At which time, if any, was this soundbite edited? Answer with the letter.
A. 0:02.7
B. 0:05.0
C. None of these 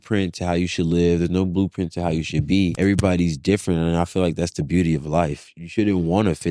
A